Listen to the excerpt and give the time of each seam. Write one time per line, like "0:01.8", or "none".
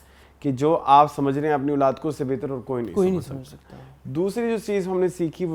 none